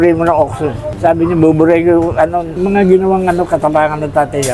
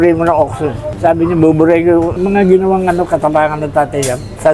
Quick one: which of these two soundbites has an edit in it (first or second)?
second